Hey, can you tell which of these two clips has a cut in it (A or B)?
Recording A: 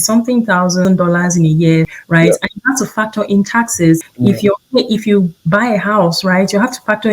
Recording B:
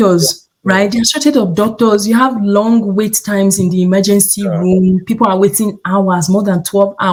A